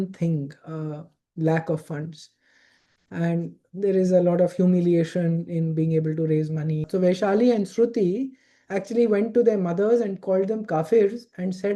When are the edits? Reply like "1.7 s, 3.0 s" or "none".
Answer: 6.8 s